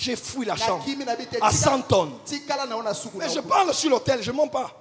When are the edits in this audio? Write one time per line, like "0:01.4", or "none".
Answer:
none